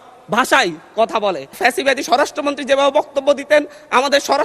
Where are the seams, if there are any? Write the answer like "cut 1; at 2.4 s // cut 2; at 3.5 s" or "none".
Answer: cut 1; at 1.6 s